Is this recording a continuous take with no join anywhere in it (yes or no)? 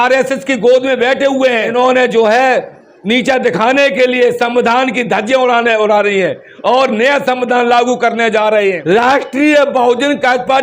no